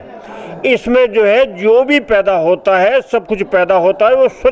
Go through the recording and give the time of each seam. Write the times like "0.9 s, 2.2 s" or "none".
none